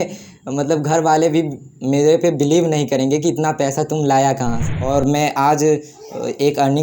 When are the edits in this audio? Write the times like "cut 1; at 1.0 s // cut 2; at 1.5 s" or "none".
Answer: cut 1; at 4.6 s